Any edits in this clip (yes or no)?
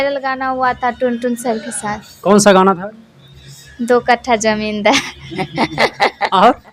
no